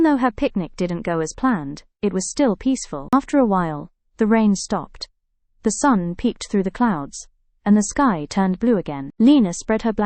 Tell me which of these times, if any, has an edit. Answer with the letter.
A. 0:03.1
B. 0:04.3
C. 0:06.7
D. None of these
A